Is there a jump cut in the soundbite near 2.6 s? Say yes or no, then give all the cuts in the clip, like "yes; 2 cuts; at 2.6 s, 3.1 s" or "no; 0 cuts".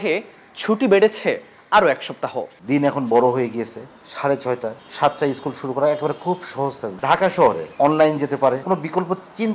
yes; 5 cuts; at 2.6 s, 4.8 s, 6.9 s, 7.7 s, 8.6 s